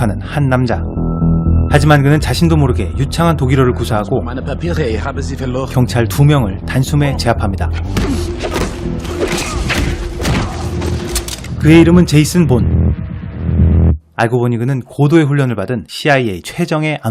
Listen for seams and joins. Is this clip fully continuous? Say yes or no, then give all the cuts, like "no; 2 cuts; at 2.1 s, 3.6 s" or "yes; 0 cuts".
yes; 0 cuts